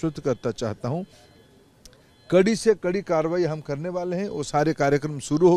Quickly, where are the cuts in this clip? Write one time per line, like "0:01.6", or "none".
none